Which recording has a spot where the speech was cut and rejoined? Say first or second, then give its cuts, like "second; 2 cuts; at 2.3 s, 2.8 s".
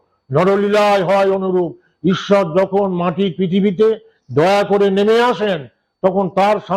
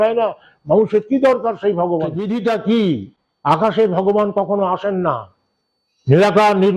second; 1 cut; at 2.2 s